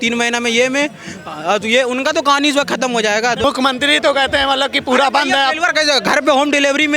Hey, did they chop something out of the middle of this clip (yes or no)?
yes